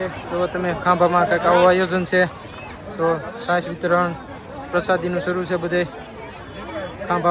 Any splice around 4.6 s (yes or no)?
no